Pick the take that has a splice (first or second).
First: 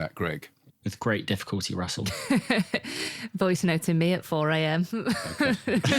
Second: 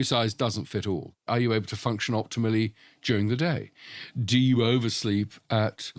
second